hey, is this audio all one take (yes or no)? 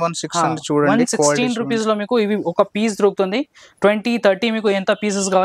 yes